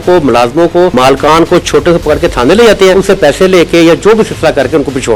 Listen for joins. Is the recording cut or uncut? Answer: cut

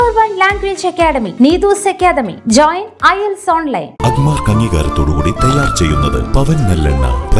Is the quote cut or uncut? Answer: uncut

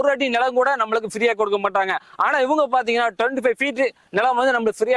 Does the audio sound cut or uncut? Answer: uncut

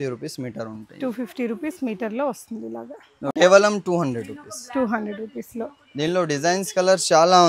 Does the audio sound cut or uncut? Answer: cut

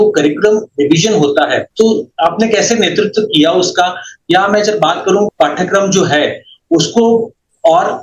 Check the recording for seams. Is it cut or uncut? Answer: uncut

